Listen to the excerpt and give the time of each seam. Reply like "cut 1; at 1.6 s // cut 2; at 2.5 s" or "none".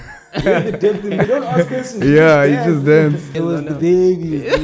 cut 1; at 1.3 s // cut 2; at 3.3 s